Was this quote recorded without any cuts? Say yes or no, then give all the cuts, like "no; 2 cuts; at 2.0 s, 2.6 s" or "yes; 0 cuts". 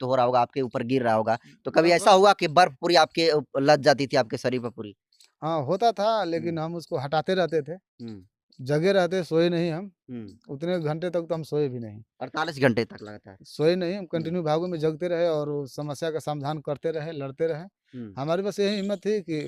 yes; 0 cuts